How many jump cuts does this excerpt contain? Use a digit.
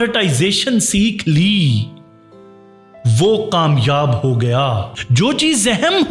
1